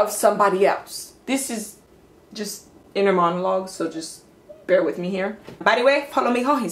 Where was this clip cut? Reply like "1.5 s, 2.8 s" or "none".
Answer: 5.6 s